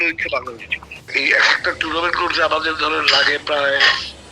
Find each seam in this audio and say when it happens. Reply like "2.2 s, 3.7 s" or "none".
1.1 s